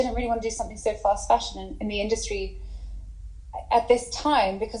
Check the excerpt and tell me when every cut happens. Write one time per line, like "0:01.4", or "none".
none